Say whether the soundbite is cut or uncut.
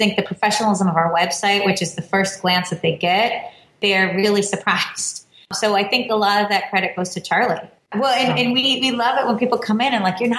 cut